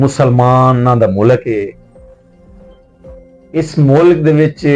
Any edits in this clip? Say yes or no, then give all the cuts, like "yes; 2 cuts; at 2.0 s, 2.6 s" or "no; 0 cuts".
no; 0 cuts